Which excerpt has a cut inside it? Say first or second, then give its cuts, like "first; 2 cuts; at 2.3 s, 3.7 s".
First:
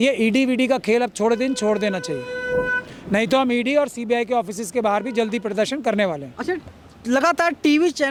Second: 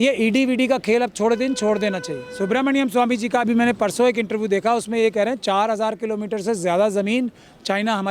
second; 1 cut; at 2.2 s